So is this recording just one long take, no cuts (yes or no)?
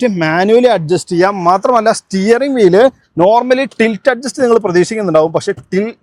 yes